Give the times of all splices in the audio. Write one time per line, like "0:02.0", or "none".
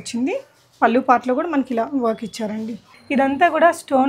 0:03.0